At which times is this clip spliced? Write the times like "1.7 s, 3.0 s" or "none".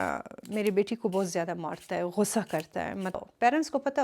3.1 s